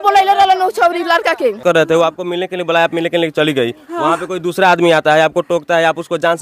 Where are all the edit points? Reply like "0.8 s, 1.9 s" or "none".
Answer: 1.6 s